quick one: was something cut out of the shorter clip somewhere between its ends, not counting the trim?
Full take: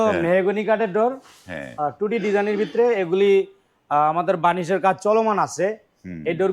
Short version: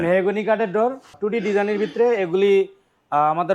yes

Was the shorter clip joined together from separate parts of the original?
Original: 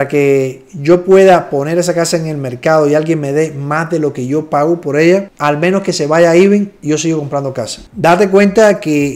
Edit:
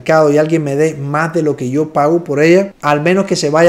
no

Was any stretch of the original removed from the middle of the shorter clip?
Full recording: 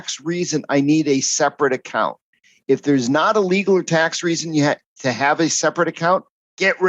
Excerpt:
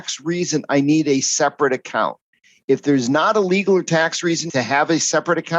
yes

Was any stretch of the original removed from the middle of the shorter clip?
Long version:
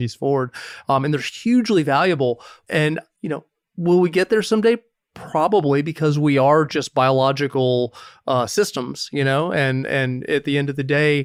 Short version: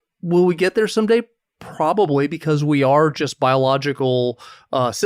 no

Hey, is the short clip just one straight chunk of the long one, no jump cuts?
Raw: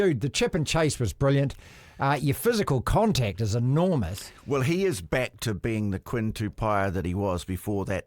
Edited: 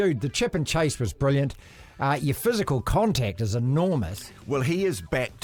yes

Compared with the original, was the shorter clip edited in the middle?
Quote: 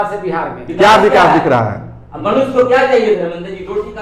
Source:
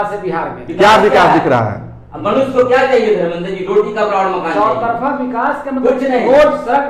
no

